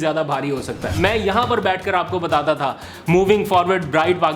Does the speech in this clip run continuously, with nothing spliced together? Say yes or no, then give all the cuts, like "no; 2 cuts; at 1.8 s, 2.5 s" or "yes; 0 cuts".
no; 1 cut; at 0.9 s